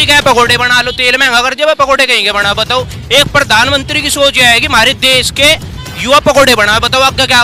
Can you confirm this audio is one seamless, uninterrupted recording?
yes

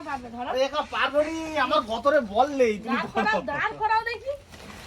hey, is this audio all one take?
yes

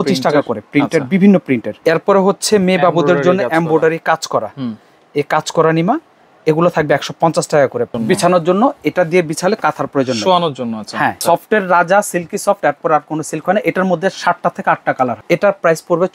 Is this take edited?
yes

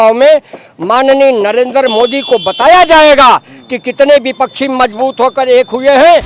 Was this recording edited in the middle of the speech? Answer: no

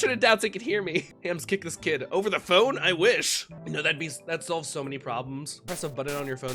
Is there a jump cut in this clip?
yes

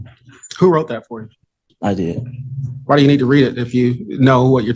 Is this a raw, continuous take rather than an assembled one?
yes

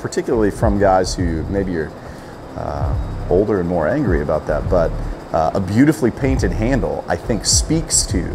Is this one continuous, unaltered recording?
yes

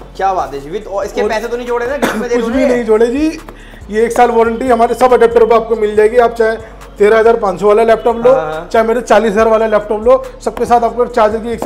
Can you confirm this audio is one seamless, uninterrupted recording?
yes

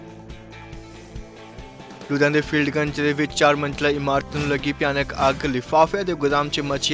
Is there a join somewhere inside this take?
no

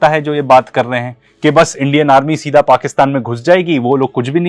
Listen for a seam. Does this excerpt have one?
no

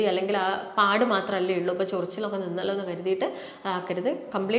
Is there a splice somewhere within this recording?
no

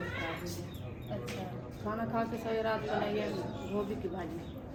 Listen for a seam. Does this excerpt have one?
no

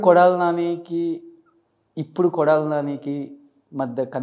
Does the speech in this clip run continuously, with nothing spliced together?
yes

